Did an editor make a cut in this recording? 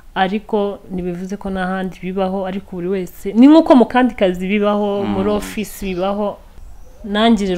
yes; 1 cut; at 6.5 s

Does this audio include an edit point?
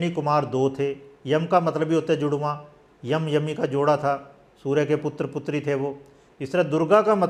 no; 0 cuts

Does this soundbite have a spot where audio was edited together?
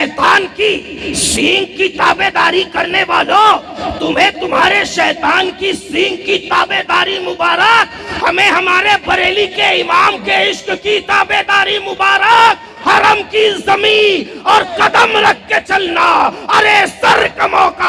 no; 0 cuts

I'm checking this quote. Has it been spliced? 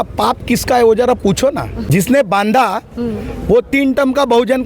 yes; 1 cut; at 1.8 s

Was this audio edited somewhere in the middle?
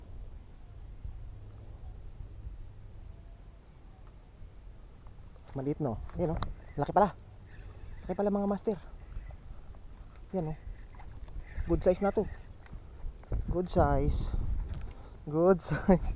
no; 0 cuts

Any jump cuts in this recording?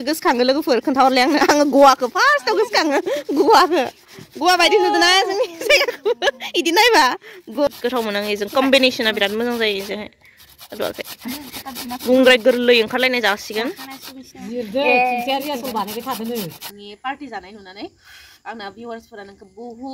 yes; 2 cuts; at 7.8 s, 16.6 s

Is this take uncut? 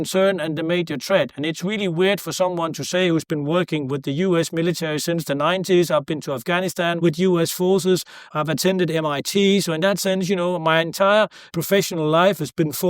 no; 3 cuts; at 7.0 s, 8.3 s, 11.5 s

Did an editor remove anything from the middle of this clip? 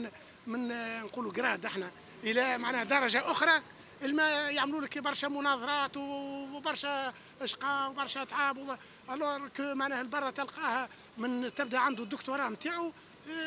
no; 0 cuts

